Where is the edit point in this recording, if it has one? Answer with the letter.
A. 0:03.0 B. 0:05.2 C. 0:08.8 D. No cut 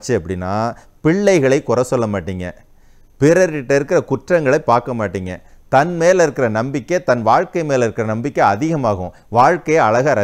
D